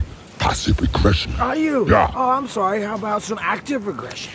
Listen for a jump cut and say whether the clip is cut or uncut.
uncut